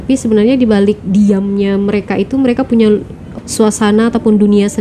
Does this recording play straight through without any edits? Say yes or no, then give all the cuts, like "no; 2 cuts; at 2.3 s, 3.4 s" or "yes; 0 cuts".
no; 1 cut; at 3.2 s